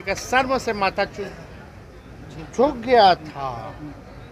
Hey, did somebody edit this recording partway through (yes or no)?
no